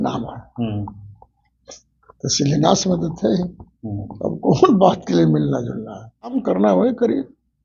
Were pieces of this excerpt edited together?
yes; 1 cut; at 6.4 s

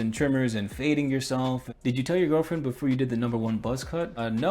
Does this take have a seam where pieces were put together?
yes; 1 cut; at 1.7 s

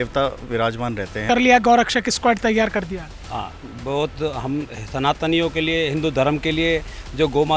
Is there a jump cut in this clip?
yes; 1 cut; at 1.2 s

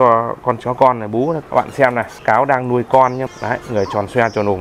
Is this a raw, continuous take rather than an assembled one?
no; 2 cuts; at 1.7 s, 3.3 s

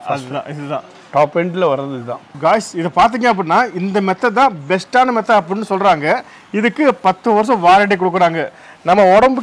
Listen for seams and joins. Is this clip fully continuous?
no; 1 cut; at 2.2 s

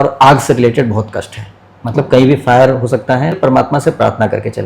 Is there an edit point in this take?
yes; 1 cut; at 3.4 s

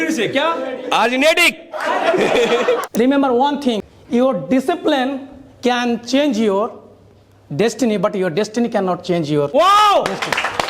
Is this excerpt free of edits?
no; 3 cuts; at 2.8 s, 3.9 s, 9.5 s

